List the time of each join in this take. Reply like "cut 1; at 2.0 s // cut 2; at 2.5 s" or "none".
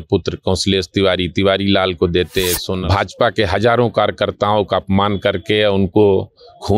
cut 1; at 2.6 s

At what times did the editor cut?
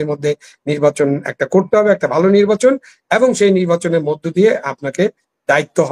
none

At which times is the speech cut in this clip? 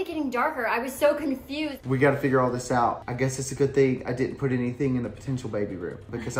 cut 1; at 1.7 s // cut 2; at 3.1 s

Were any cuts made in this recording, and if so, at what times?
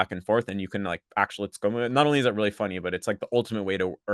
none

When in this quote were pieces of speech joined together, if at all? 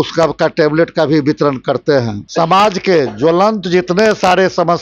cut 1; at 2.2 s

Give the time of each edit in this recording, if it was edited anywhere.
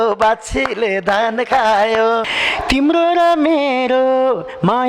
cut 1; at 2.3 s

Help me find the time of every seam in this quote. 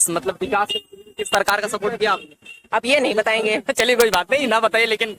none

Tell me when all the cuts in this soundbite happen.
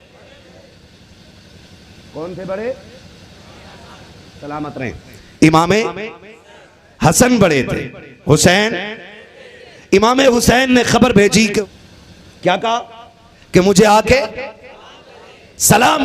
cut 1; at 11.6 s

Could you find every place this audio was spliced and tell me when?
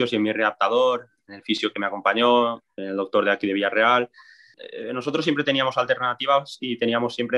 cut 1; at 4.6 s

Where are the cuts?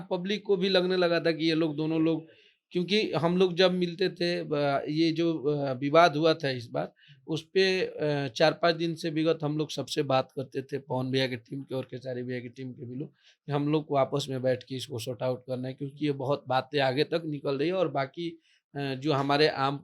none

